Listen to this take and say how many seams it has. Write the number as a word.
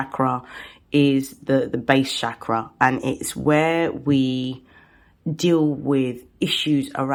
zero